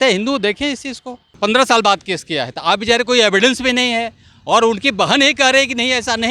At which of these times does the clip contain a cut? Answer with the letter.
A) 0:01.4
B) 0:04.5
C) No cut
A